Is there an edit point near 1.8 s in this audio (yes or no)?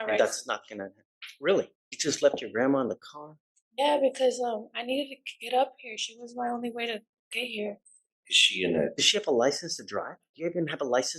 yes